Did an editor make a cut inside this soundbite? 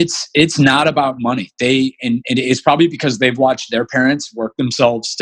no; 0 cuts

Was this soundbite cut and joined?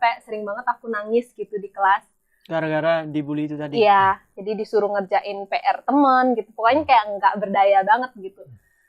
no; 0 cuts

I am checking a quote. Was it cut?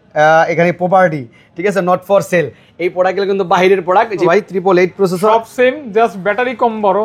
yes; 1 cut; at 4.3 s

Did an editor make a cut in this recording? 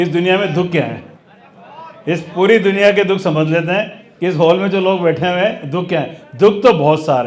no; 0 cuts

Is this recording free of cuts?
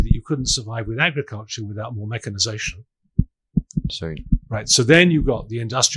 yes; 0 cuts

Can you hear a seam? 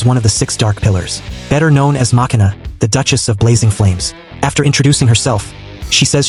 no; 0 cuts

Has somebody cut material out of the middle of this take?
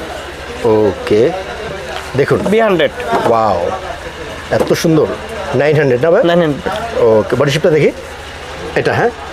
yes; 1 cut; at 1.6 s

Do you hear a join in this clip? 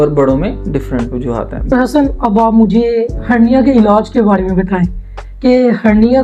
yes; 1 cut; at 1.7 s

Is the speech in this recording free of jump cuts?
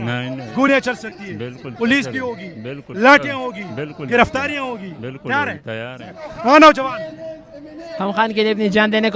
no; 1 cut; at 6.3 s

